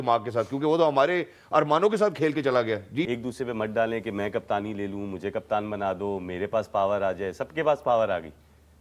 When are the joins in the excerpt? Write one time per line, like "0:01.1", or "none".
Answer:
0:03.1